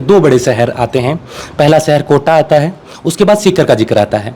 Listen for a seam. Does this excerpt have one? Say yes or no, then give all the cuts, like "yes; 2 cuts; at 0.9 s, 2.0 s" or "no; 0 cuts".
no; 0 cuts